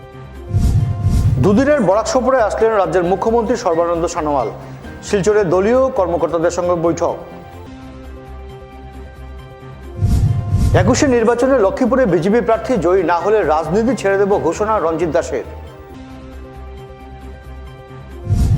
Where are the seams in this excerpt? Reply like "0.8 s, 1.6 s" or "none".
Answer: 1.1 s